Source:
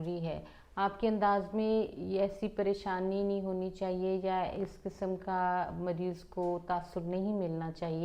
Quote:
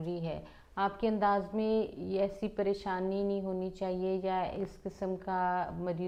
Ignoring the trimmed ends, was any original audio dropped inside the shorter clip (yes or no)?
no